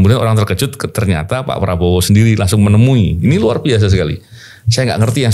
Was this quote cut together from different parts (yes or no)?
no